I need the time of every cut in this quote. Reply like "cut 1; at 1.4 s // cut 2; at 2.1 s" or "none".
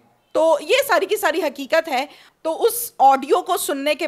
cut 1; at 2.2 s